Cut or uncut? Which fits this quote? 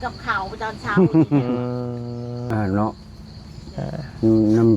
cut